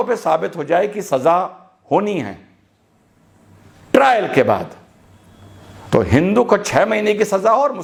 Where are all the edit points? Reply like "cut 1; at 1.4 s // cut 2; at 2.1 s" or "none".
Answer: none